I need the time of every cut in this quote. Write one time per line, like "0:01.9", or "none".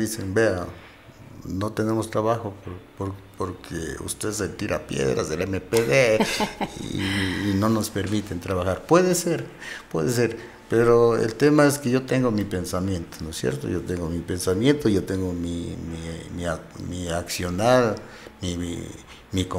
none